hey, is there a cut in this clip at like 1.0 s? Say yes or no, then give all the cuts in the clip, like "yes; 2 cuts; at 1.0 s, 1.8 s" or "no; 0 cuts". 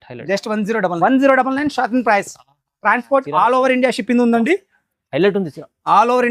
yes; 1 cut; at 1.0 s